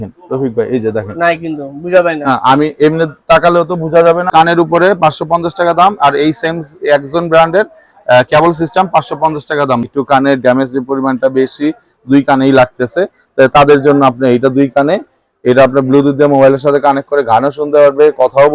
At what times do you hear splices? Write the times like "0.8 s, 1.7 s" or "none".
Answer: 4.3 s, 9.9 s